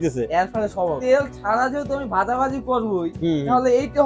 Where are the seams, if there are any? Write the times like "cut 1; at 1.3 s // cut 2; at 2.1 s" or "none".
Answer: cut 1; at 1.0 s